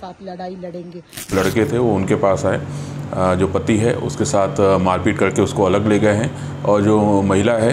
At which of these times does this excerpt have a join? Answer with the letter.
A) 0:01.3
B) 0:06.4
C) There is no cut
A